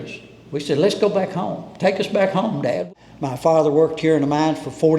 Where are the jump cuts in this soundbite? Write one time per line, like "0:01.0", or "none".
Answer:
0:02.8